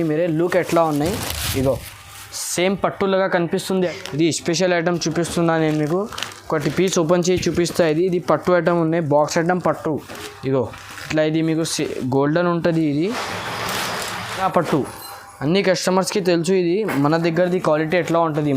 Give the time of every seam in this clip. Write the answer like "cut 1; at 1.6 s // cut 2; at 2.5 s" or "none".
cut 1; at 3.9 s // cut 2; at 14.4 s